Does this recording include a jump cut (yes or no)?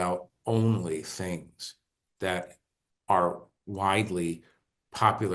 no